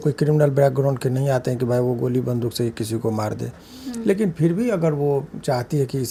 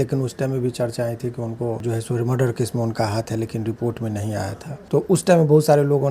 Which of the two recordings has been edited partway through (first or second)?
second